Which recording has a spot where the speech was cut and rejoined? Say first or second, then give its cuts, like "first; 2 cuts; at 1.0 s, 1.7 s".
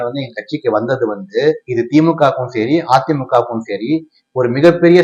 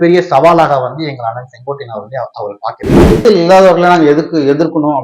second; 1 cut; at 3.2 s